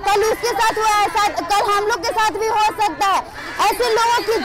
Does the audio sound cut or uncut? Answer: uncut